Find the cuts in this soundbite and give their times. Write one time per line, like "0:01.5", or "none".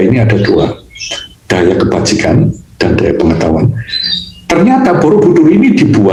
none